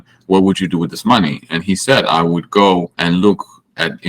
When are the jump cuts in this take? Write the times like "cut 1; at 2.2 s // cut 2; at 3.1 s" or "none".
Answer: cut 1; at 2.9 s